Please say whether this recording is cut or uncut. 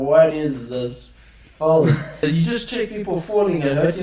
cut